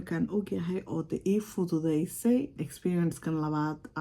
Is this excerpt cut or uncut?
cut